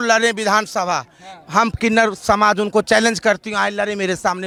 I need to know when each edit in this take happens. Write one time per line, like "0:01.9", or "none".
none